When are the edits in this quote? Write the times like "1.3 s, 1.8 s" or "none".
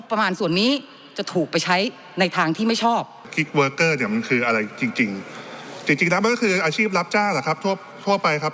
3.3 s

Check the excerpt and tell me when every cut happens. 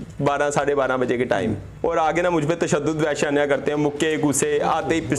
1.7 s

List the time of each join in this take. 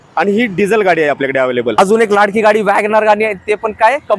1.8 s

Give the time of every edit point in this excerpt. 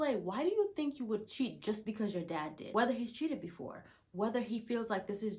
2.7 s

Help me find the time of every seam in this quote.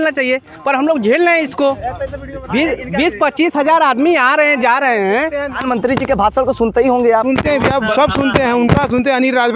5.6 s

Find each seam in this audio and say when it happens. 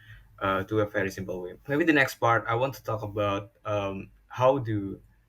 1.5 s

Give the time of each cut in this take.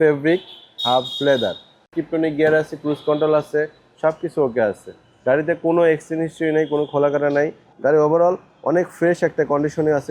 1.9 s, 7.6 s

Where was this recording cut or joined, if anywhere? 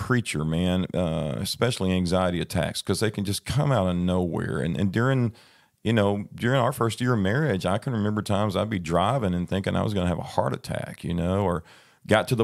none

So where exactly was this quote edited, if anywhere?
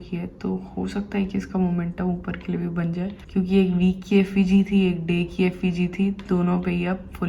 3.2 s

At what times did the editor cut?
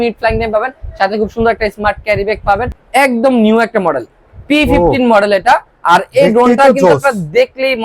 2.8 s

